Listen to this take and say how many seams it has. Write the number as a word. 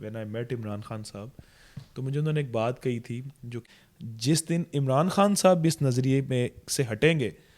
one